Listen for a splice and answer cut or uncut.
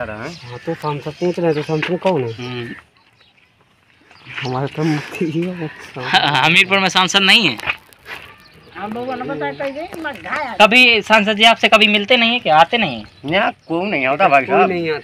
uncut